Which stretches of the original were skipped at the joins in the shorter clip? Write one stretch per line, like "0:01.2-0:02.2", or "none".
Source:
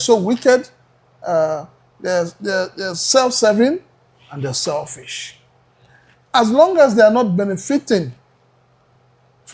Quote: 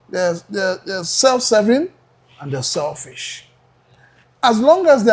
none